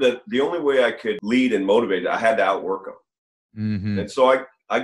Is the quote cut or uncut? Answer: cut